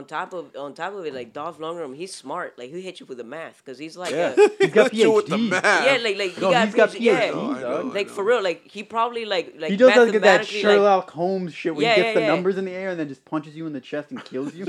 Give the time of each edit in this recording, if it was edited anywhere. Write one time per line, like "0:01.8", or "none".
none